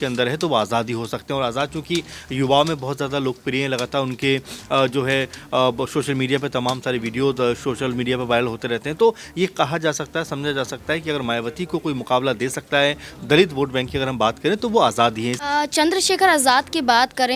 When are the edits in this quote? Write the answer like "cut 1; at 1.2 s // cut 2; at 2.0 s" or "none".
cut 1; at 15.4 s